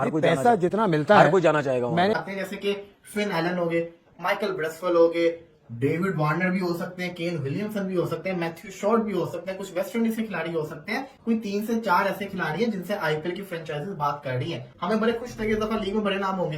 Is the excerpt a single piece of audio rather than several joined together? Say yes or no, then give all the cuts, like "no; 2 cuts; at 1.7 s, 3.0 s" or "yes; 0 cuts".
no; 1 cut; at 2.2 s